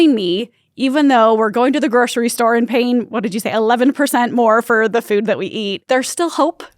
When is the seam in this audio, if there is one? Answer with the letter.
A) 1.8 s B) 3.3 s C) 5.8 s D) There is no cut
C